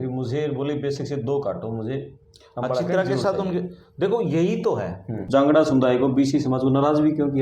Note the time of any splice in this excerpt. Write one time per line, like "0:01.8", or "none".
0:05.2